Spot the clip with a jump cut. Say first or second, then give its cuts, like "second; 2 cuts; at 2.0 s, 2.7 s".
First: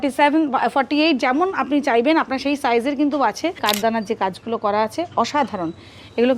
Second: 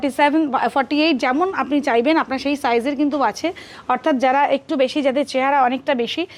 first; 1 cut; at 3.6 s